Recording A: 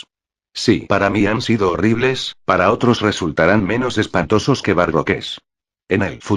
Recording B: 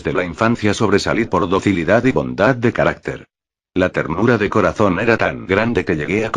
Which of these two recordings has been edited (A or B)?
B